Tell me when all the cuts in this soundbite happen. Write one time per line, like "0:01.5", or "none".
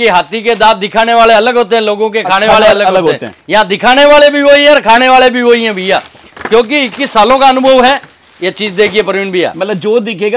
none